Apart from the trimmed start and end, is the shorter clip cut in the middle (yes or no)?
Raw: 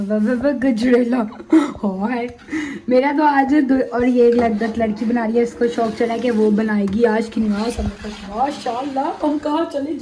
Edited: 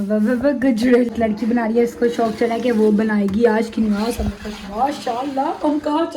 yes